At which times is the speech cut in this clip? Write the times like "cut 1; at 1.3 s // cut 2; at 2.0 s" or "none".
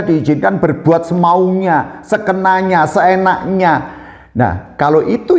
none